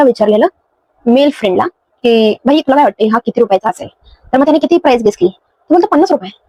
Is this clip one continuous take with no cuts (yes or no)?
yes